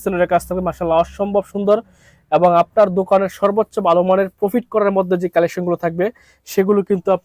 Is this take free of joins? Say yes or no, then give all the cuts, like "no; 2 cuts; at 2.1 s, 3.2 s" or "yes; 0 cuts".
yes; 0 cuts